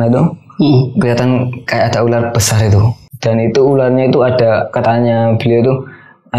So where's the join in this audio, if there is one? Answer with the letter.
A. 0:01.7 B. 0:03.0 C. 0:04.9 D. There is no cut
B